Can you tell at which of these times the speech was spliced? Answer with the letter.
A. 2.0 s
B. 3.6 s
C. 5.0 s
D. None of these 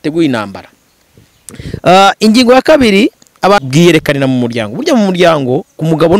B